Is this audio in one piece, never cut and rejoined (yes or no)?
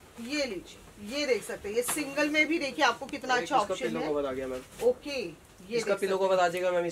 yes